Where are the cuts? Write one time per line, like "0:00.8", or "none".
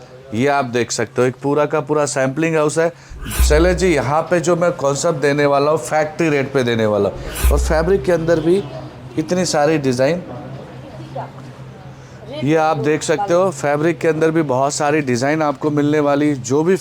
0:03.3
0:07.4